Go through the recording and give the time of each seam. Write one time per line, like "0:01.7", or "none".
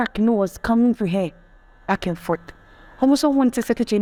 none